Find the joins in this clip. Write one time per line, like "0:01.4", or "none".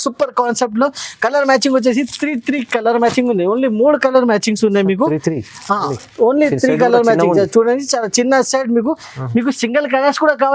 none